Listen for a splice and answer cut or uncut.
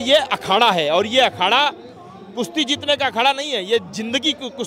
uncut